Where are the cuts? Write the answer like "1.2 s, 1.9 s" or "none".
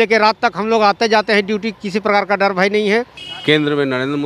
3.2 s